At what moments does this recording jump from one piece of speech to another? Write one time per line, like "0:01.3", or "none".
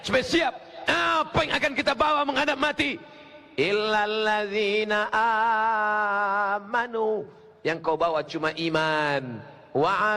none